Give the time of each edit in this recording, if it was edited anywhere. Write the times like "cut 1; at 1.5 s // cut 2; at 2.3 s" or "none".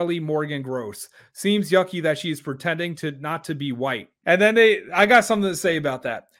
none